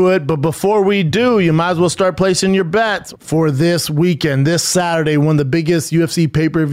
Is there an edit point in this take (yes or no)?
yes